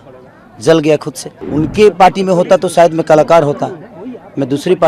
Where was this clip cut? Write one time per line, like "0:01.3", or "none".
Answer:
0:01.3